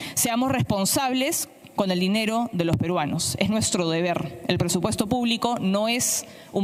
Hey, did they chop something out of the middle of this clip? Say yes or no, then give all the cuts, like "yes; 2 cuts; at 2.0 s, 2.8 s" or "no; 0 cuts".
no; 0 cuts